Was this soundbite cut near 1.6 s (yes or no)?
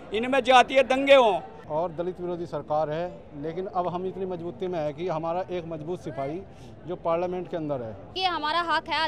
yes